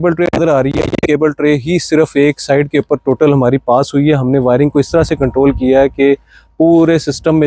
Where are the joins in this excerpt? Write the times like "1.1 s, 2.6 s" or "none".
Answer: none